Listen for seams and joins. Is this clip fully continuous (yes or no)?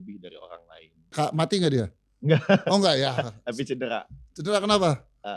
no